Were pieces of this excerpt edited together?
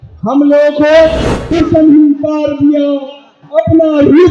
yes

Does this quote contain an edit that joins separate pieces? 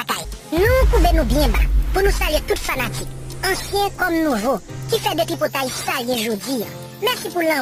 no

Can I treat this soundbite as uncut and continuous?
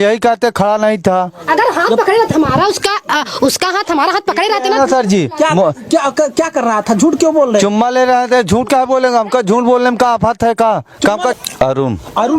no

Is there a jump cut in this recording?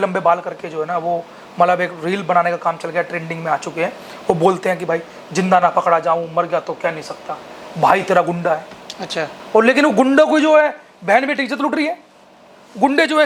no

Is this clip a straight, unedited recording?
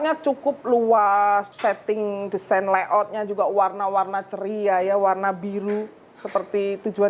no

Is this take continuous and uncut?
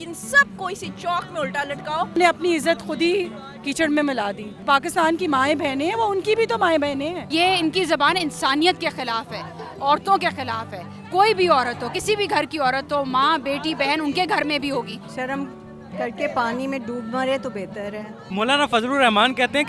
no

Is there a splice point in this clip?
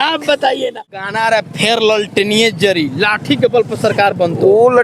yes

